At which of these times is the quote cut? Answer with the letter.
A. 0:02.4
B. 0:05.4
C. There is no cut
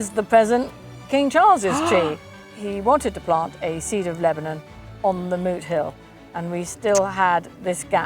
A